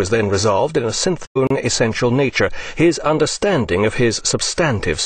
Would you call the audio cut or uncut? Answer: uncut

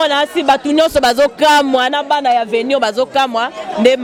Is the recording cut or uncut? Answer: uncut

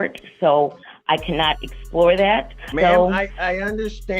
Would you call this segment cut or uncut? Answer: cut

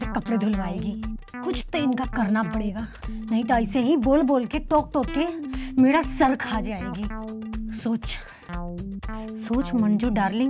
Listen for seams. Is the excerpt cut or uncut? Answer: uncut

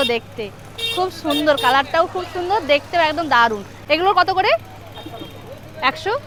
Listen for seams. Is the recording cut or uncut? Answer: uncut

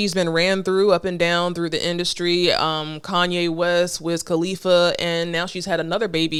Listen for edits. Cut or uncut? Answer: uncut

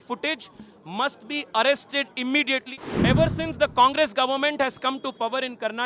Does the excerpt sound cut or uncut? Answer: cut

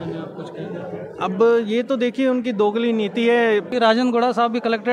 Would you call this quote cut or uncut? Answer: cut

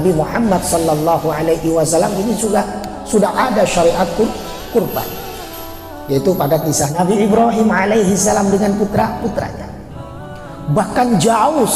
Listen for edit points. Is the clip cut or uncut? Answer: cut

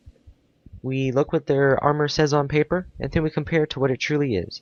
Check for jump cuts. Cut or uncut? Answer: uncut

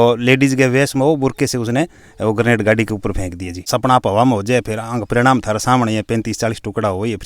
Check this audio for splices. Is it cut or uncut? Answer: cut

